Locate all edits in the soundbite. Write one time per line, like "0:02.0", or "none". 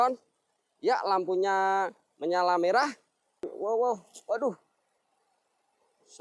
0:03.5